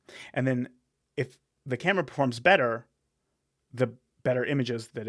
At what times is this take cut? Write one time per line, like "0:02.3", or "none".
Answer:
none